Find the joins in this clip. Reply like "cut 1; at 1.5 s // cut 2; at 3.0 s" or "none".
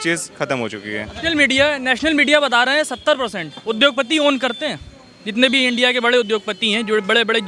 cut 1; at 1.1 s